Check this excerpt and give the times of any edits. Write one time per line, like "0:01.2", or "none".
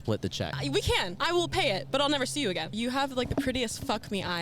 0:01.0
0:02.8